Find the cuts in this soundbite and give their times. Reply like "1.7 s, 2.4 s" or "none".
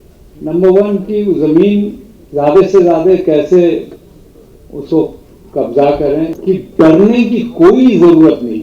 6.3 s

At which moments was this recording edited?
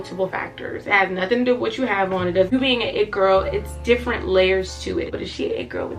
2.5 s, 5.1 s

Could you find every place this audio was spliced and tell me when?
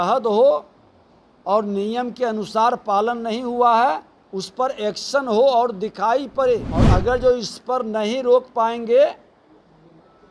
6.8 s

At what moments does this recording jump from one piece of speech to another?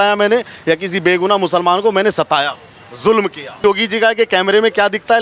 3.6 s

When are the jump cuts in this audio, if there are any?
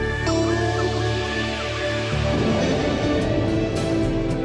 none

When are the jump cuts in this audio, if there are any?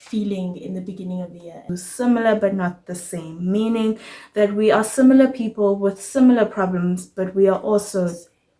1.7 s

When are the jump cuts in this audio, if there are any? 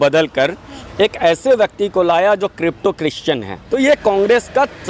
3.6 s

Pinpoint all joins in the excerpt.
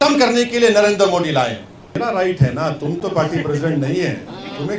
1.9 s

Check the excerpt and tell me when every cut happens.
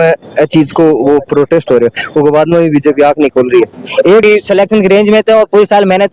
4.2 s

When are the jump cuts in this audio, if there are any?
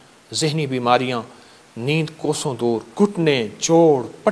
2.9 s

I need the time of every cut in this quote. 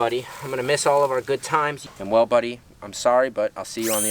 1.8 s

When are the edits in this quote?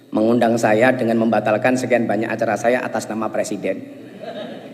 none

